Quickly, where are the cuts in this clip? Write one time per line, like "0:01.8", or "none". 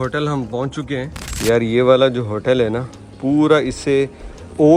0:01.2